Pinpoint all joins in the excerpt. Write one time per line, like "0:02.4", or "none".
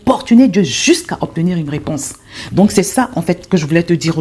none